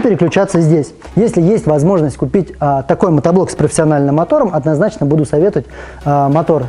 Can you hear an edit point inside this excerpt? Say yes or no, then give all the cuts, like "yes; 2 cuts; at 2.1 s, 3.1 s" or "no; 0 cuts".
yes; 1 cut; at 1.0 s